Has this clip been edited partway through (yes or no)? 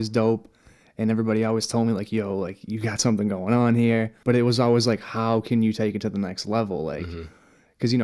yes